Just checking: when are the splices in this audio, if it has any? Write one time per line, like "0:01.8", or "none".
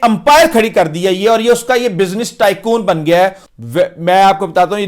0:03.5